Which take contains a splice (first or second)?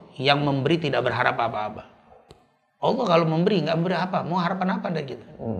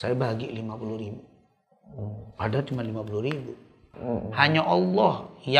second